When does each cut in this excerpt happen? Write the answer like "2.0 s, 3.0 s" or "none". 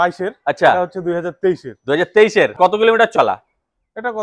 2.6 s